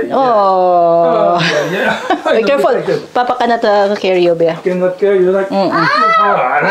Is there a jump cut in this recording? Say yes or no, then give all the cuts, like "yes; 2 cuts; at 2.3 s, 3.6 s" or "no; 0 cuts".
no; 0 cuts